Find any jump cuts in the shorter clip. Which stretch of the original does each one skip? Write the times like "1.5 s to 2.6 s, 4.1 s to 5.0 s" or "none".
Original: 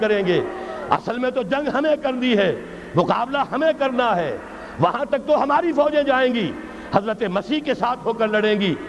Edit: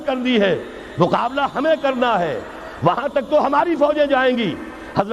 none